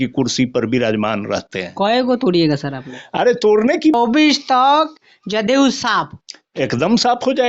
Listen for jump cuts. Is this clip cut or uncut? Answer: cut